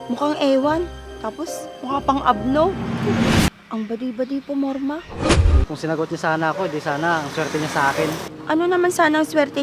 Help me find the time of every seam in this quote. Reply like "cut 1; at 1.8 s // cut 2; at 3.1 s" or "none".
cut 1; at 3.5 s // cut 2; at 5.7 s // cut 3; at 8.3 s

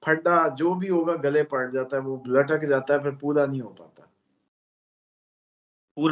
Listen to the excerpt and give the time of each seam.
none

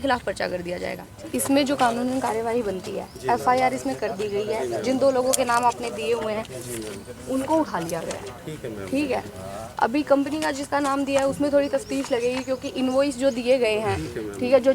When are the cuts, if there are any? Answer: cut 1; at 1.1 s

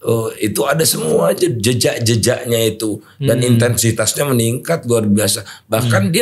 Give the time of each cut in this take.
none

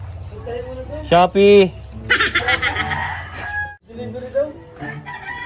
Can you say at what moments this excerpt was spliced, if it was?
cut 1; at 3.8 s

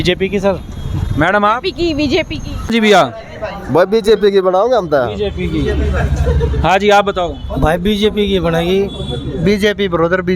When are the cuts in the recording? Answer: cut 1; at 2.7 s

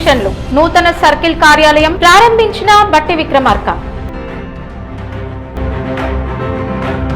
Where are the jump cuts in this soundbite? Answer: cut 1; at 5.4 s

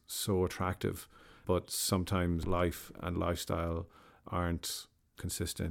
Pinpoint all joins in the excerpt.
cut 1; at 2.4 s

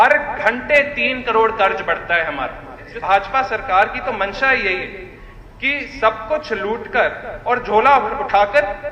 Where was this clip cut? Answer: cut 1; at 2.9 s

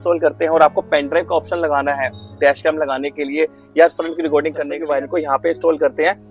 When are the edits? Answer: cut 1; at 4.7 s

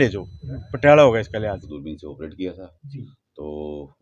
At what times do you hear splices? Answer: cut 1; at 1.6 s

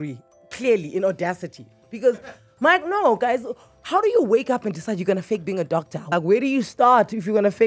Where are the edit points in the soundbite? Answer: cut 1; at 6.1 s

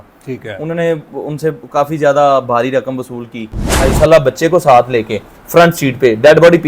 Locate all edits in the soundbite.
cut 1; at 3.9 s

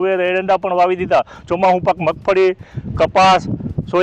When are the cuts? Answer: none

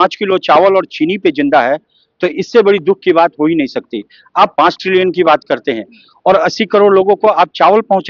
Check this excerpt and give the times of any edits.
none

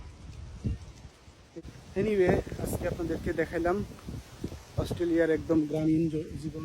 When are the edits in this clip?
cut 1; at 1.6 s

